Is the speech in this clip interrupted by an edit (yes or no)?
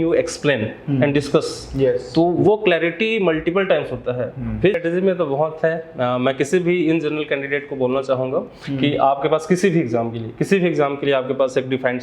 yes